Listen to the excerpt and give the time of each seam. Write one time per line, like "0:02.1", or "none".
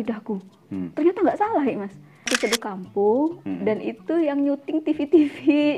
0:02.3